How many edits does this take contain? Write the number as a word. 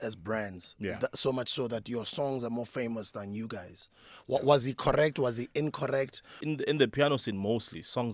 one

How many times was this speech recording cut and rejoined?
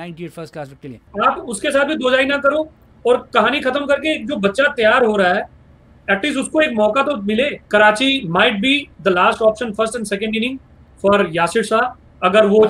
two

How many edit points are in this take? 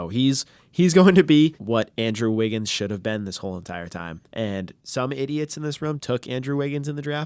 three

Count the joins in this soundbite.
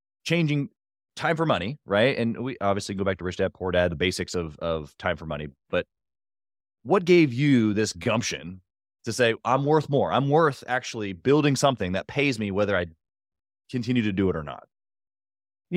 zero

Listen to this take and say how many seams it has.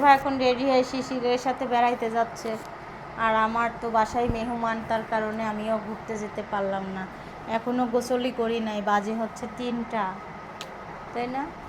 zero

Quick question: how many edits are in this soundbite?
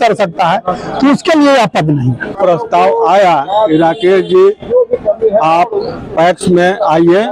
one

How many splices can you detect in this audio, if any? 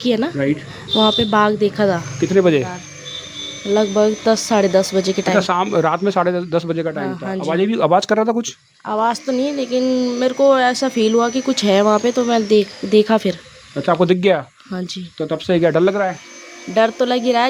zero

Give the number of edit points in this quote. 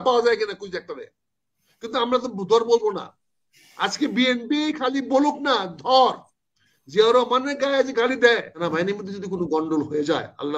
one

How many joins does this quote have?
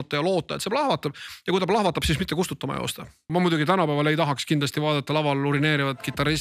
one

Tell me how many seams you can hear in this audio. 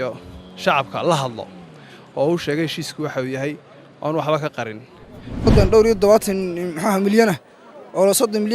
one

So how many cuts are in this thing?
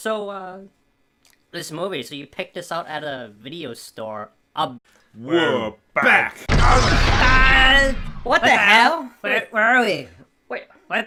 zero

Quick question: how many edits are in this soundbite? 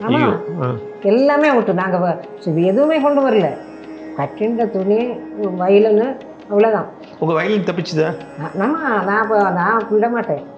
zero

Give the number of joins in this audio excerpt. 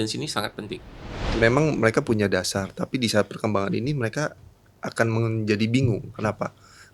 one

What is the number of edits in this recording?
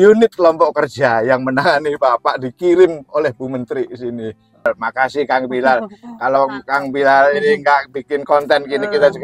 one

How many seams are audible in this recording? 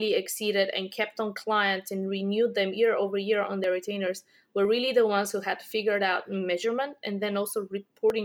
zero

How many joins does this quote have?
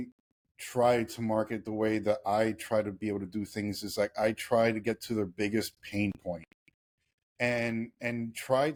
zero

